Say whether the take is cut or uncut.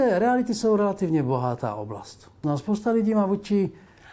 cut